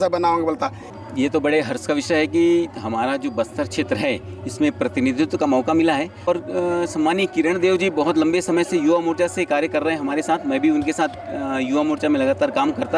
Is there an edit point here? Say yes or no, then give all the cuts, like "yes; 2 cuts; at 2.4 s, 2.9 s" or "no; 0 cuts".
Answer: yes; 2 cuts; at 0.9 s, 6.3 s